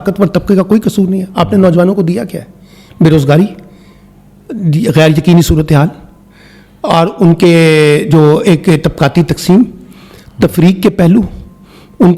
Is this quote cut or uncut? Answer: uncut